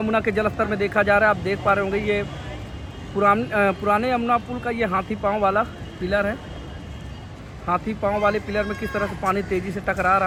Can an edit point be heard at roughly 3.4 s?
no; 0 cuts

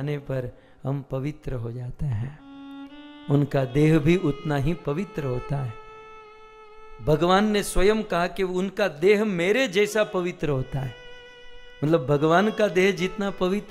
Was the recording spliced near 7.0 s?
no; 0 cuts

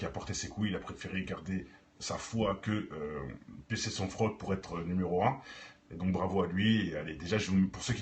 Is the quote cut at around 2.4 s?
no; 1 cut; at 6.8 s

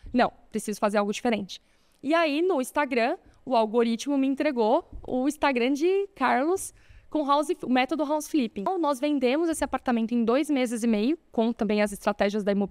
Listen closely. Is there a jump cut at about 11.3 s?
no; 1 cut; at 8.7 s

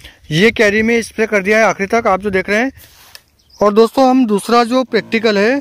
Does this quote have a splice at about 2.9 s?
yes; 1 cut; at 2.9 s

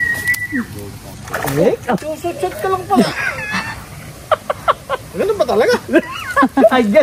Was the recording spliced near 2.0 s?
yes; 2 cuts; at 1.1 s, 2.0 s

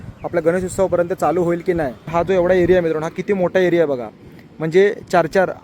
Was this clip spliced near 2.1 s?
yes; 1 cut; at 2.1 s

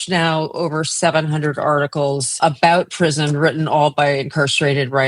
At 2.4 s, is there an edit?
yes; 1 cut; at 2.4 s

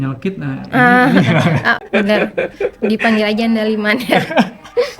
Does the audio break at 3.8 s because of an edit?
no; 1 cut; at 1.8 s

